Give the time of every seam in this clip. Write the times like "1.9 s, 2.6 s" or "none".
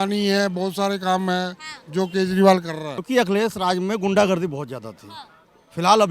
2.9 s